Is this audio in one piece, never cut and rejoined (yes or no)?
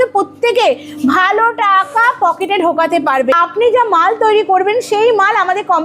no